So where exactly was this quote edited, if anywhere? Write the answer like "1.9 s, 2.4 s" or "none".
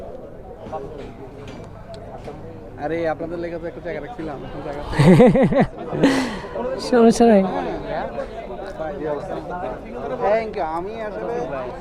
none